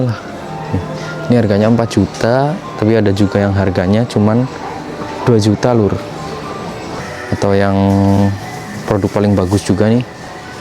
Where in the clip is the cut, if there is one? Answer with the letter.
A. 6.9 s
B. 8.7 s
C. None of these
A